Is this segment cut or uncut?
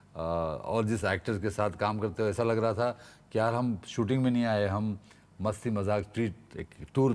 uncut